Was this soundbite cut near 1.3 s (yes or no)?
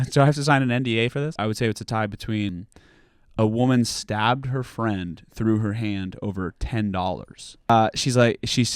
yes